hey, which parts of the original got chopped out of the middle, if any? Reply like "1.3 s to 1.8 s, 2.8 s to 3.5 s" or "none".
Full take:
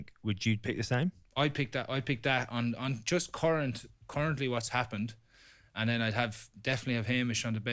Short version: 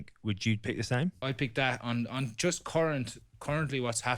1.2 s to 1.9 s